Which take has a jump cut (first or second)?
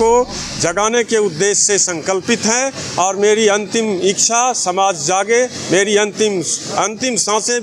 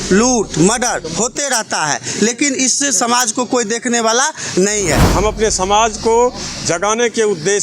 second